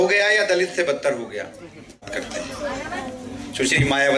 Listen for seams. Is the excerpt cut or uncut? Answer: cut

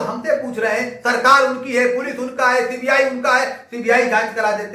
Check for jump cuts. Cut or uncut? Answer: uncut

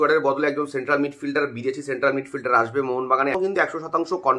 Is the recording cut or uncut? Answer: cut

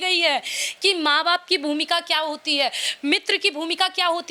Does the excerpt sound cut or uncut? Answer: uncut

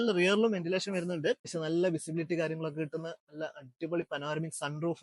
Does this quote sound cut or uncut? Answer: cut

